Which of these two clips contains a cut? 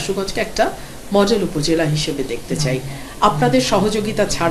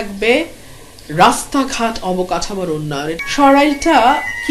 second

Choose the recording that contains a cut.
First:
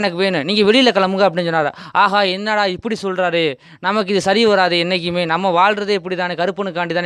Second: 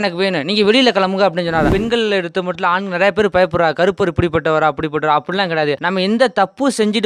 second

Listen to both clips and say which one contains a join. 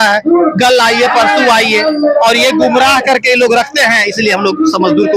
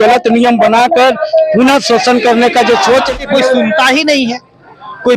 second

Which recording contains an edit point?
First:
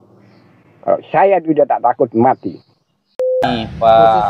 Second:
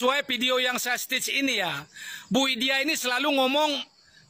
first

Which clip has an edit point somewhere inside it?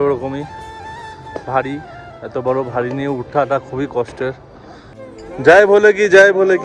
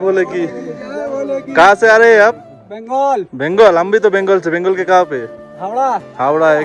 first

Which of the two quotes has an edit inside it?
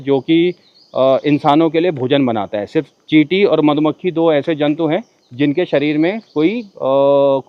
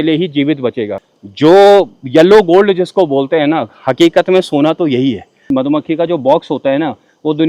second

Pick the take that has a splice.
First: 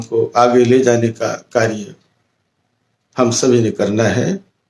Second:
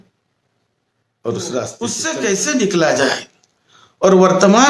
second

